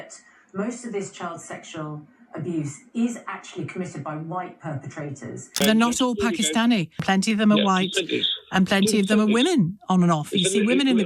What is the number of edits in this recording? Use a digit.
1